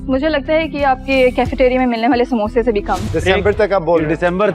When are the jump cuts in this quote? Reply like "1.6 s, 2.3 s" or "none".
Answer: 3.0 s

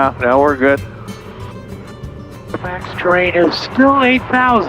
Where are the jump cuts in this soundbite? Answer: 2.0 s

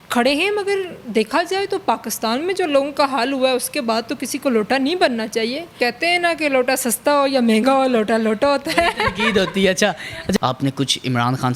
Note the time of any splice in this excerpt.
5.7 s, 10.4 s

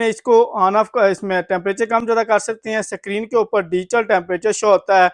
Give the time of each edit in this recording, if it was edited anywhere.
none

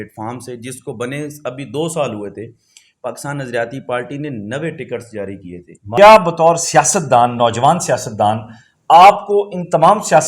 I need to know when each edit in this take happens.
6.0 s

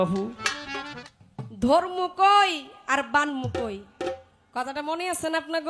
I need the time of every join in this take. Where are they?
1.1 s

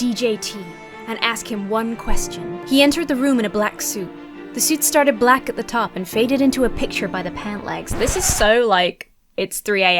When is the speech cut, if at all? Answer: 2.6 s

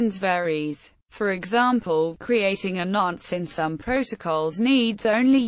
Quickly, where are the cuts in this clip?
2.2 s

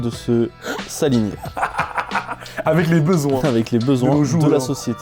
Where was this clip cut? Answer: none

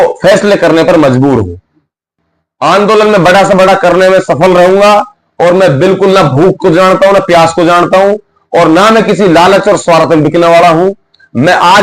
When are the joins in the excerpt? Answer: 2.2 s

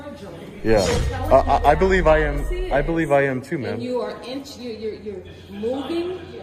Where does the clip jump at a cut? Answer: none

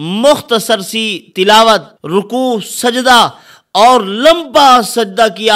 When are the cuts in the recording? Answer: 1.9 s

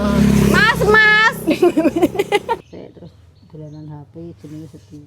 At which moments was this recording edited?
2.6 s

